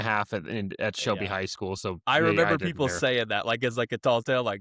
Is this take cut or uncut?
uncut